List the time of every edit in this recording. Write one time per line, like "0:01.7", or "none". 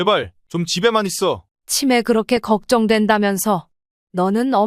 0:01.5